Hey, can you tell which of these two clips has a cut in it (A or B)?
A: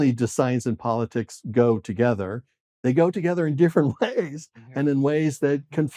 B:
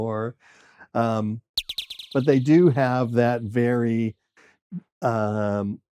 B